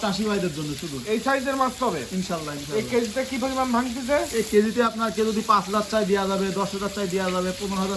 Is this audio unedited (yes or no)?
yes